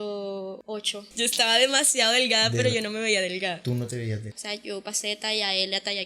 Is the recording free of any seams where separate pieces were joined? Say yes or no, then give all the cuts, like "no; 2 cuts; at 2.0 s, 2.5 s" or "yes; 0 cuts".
no; 2 cuts; at 1.1 s, 4.3 s